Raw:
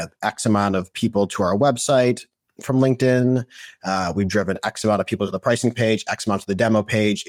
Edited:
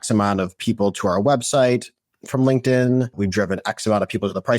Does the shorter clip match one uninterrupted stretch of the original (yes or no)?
no